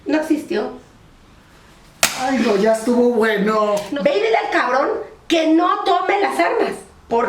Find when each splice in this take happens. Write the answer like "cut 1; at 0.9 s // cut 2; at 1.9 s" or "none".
cut 1; at 3.9 s